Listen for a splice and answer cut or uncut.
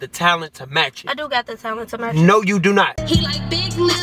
cut